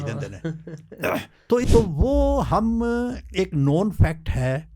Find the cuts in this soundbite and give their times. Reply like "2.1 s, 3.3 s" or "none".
1.6 s